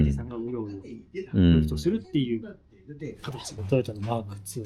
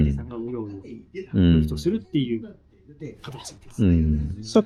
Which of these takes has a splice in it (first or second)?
first